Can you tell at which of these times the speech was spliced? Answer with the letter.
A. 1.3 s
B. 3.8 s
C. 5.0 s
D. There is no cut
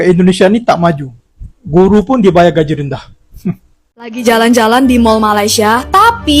B